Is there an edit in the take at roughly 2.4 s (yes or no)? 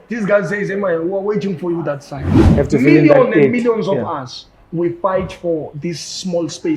yes